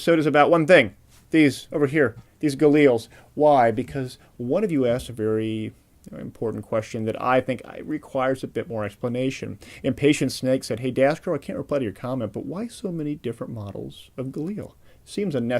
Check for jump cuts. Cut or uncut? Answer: uncut